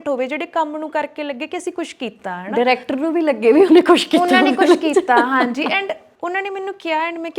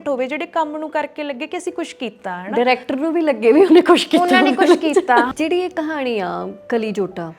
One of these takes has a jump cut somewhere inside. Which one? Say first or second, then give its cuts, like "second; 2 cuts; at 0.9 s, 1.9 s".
second; 1 cut; at 5.3 s